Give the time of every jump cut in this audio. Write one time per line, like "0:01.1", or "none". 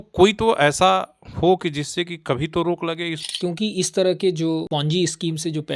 0:03.2
0:04.7